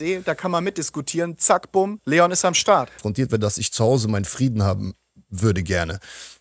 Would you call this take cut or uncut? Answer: cut